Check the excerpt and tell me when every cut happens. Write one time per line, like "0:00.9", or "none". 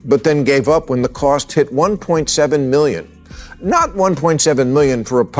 none